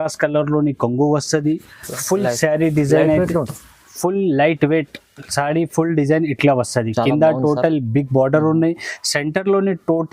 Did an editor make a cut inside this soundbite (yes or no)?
no